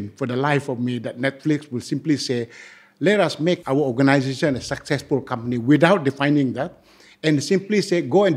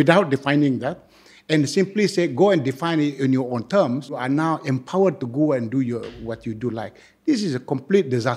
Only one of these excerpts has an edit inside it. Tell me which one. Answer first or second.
second